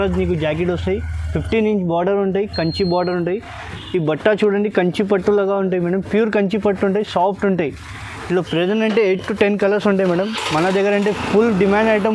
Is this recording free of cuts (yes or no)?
yes